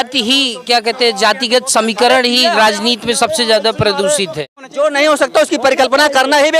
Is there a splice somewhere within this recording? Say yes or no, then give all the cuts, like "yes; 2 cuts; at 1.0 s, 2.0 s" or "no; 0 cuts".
yes; 1 cut; at 4.6 s